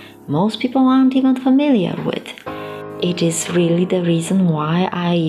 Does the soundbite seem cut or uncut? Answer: cut